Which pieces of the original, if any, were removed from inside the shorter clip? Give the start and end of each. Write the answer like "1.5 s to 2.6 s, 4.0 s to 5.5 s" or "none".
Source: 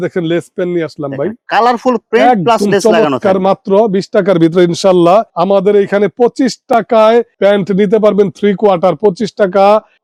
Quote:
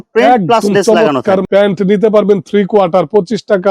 3.4 s to 7.3 s